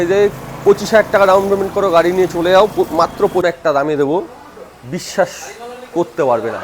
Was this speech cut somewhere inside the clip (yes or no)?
yes